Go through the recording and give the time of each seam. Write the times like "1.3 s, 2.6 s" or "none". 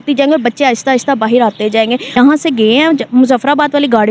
2.2 s